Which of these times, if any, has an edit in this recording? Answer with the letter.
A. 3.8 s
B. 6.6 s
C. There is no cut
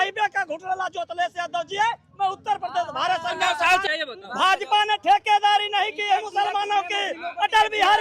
A